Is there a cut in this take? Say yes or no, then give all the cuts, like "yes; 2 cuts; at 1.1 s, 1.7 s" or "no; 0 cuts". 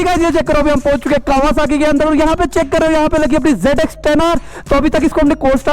no; 0 cuts